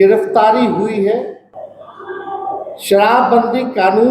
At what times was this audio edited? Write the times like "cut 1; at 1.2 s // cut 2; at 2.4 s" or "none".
cut 1; at 1.6 s